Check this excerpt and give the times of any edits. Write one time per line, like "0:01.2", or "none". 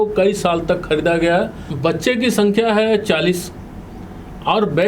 0:01.6